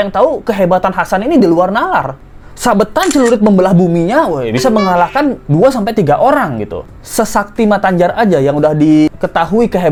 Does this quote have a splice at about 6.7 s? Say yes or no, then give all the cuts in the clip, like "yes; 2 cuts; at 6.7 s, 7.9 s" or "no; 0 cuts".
no; 0 cuts